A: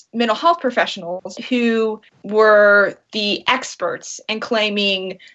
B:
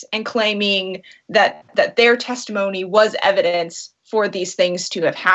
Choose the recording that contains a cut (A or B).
A